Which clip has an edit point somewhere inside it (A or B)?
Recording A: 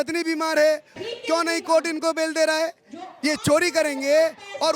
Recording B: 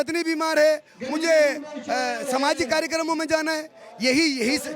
A